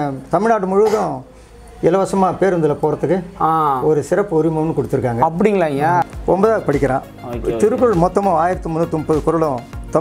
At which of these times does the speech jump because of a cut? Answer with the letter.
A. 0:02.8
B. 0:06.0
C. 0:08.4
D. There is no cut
B